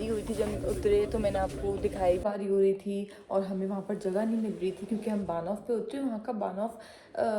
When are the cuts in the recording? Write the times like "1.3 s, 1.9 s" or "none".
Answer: 2.2 s